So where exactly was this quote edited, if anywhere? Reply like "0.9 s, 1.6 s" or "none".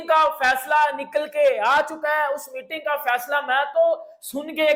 none